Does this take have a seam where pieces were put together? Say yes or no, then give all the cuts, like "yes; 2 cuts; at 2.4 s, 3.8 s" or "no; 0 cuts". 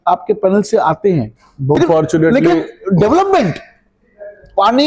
yes; 1 cut; at 1.8 s